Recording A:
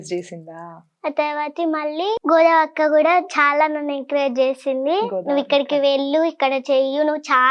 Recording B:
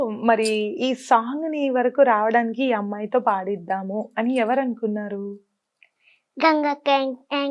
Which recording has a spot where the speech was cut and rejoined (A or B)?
A